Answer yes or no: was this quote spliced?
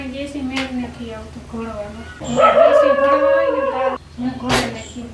yes